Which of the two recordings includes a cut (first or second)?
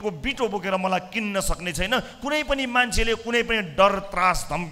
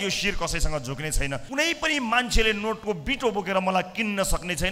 second